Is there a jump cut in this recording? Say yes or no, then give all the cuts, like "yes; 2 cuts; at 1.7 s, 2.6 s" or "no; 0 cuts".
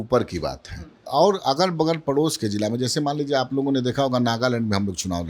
yes; 1 cut; at 1.0 s